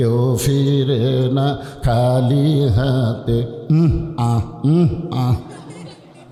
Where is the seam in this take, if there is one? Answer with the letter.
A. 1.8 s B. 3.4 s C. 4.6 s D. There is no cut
D